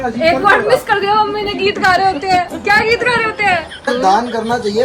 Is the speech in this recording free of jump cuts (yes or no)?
no